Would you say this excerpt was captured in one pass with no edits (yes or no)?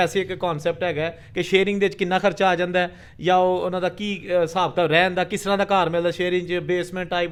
yes